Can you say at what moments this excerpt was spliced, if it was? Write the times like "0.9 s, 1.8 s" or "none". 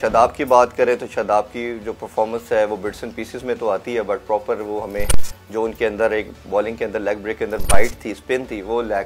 none

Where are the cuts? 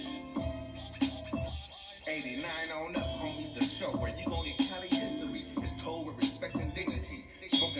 1.4 s

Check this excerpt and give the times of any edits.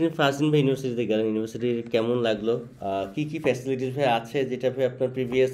none

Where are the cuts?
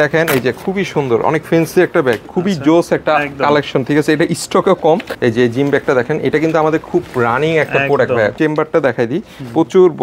2.3 s, 5.1 s, 8.3 s

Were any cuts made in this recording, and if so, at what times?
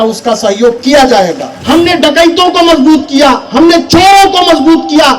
1.5 s

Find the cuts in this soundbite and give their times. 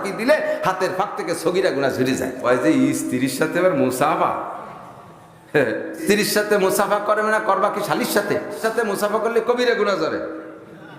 2.4 s, 6.0 s, 8.6 s

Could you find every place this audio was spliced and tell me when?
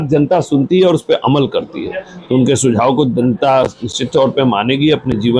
none

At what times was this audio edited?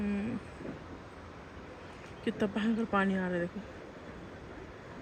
none

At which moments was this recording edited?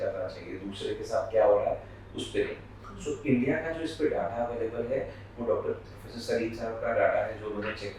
none

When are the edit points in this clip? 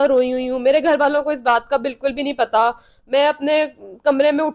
none

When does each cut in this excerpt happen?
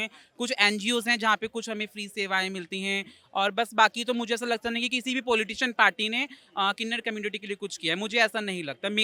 none

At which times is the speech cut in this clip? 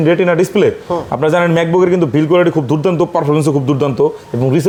none

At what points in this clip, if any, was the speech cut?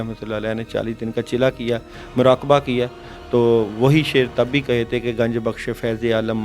none

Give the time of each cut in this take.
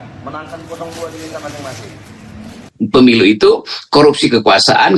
2.7 s

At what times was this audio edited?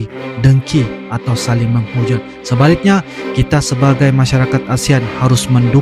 none

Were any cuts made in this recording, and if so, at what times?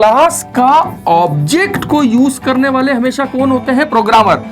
none

